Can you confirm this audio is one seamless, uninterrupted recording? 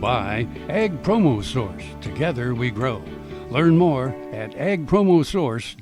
yes; 0 cuts

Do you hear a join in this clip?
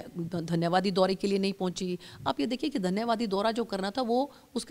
no; 0 cuts

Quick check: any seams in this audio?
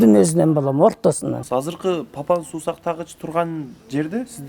yes; 1 cut; at 1.4 s

